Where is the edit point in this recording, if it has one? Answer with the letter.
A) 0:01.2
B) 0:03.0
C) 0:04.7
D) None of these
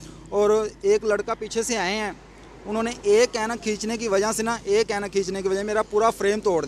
D